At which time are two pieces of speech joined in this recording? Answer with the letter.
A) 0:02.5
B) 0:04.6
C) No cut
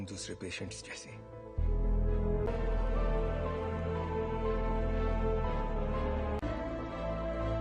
A